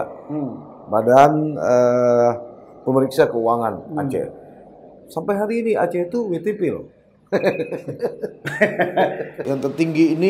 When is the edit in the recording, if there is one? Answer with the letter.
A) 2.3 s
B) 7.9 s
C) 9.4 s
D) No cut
C